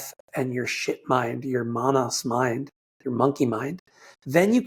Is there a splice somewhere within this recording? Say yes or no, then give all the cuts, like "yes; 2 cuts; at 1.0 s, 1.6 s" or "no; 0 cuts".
no; 0 cuts